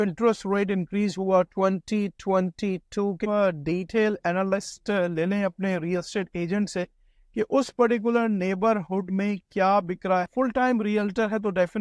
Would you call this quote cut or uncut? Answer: cut